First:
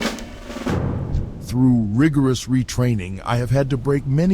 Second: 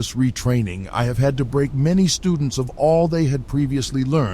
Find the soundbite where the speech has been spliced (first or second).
first